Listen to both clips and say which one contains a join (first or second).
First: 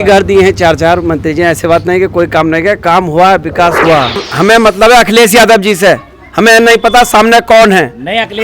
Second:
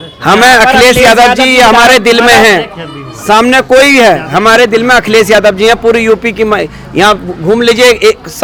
first